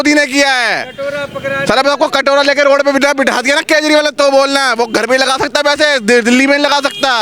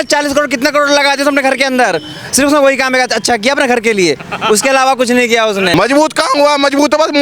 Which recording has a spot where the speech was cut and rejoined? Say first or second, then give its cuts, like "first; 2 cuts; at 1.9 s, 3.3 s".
second; 1 cut; at 5.7 s